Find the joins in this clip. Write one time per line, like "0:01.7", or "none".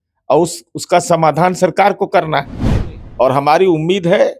none